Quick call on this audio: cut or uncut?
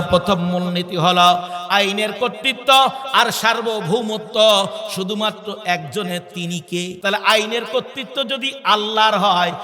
cut